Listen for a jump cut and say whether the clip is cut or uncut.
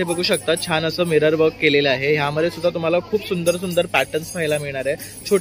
uncut